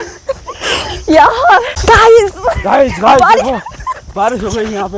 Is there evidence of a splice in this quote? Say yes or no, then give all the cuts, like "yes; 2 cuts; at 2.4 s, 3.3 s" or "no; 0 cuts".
yes; 1 cut; at 1.7 s